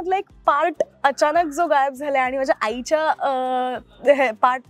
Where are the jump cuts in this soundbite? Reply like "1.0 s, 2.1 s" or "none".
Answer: none